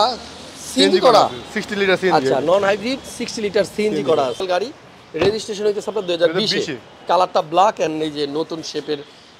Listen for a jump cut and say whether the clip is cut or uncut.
cut